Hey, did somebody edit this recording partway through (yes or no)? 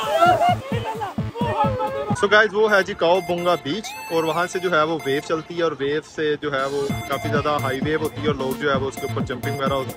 yes